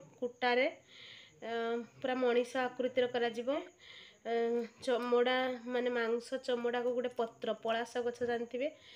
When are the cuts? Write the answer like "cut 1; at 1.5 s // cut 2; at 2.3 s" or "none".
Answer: cut 1; at 3.7 s